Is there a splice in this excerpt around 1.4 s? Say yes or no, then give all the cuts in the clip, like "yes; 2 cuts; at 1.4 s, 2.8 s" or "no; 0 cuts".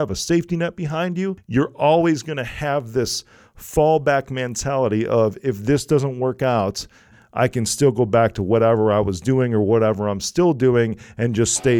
yes; 2 cuts; at 1.4 s, 7.1 s